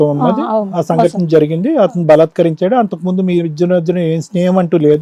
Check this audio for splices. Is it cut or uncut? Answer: uncut